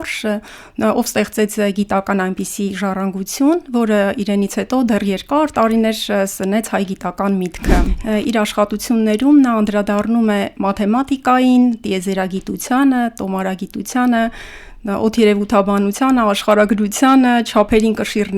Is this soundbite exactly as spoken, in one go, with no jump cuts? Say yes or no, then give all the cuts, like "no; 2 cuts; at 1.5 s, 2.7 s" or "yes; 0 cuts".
no; 1 cut; at 7.9 s